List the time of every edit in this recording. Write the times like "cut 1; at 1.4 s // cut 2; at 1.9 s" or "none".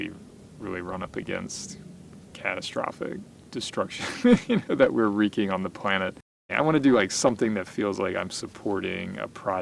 cut 1; at 3.4 s // cut 2; at 6.5 s